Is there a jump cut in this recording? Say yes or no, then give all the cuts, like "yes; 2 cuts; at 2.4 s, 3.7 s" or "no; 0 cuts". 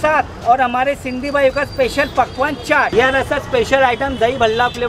yes; 1 cut; at 2.9 s